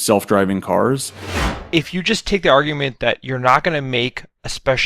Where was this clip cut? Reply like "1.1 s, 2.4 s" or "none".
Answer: 1.4 s